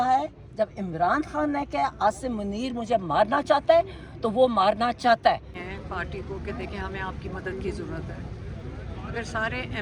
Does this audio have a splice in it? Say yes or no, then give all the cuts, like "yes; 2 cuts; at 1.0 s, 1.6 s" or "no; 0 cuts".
yes; 1 cut; at 5.7 s